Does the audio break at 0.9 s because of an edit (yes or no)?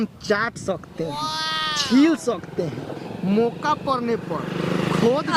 no